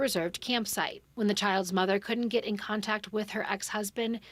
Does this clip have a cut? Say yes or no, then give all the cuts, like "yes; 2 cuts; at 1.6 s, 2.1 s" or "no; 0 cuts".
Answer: yes; 1 cut; at 1.0 s